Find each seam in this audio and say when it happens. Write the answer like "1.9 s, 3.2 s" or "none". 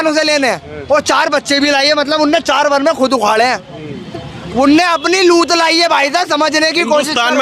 none

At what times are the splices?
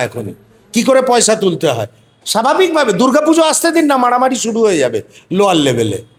none

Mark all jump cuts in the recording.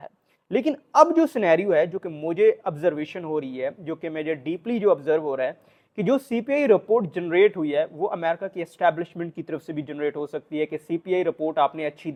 none

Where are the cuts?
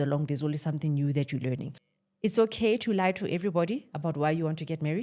1.8 s

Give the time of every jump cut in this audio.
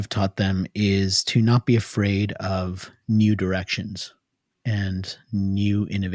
none

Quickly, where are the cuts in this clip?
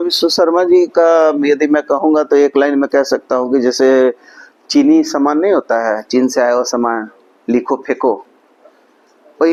none

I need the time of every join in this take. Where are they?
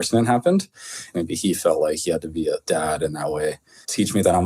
1.1 s, 2.6 s

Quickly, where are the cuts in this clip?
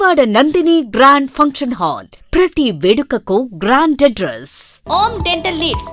4.8 s

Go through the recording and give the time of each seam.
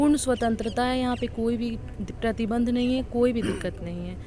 none

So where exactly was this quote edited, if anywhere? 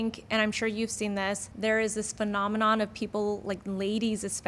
1.5 s

